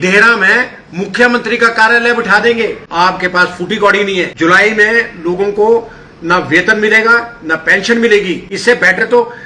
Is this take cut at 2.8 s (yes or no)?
yes